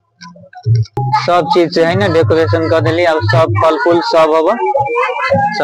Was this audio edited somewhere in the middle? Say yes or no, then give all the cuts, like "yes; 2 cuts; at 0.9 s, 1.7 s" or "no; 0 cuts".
yes; 1 cut; at 1.0 s